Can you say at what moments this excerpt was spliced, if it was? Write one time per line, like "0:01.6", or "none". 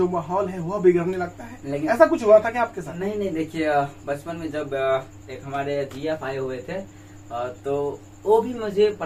none